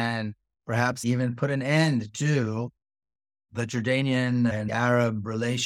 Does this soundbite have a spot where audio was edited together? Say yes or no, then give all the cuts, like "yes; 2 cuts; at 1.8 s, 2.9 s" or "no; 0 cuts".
yes; 2 cuts; at 3.5 s, 4.7 s